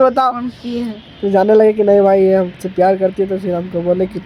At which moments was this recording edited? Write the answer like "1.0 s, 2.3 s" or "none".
none